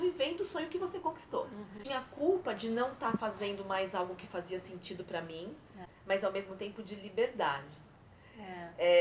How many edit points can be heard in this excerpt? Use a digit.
2